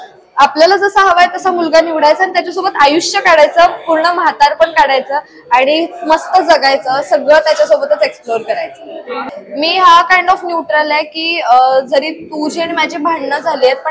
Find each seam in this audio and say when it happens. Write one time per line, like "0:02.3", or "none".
0:09.3